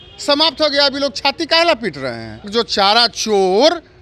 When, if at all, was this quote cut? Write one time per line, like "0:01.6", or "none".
0:02.5